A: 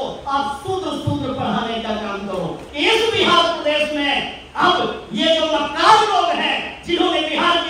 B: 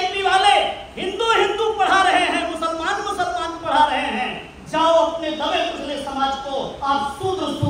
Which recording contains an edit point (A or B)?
A